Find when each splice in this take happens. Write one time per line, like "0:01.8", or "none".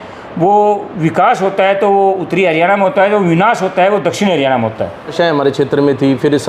0:05.1